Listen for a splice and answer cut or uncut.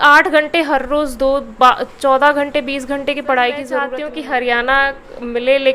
cut